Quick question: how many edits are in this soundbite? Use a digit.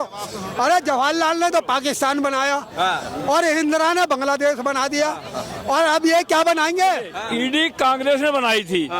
1